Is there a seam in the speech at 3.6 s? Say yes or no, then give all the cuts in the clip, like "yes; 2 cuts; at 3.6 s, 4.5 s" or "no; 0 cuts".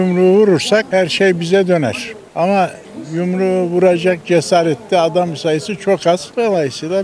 no; 0 cuts